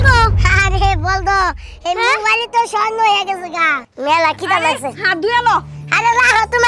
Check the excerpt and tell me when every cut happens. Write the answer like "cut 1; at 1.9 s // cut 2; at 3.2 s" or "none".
cut 1; at 3.8 s